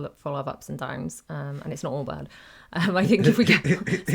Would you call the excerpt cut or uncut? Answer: uncut